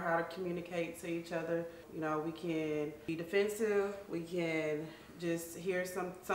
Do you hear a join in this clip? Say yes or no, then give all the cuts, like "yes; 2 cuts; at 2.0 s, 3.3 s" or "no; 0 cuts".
yes; 2 cuts; at 1.8 s, 3.0 s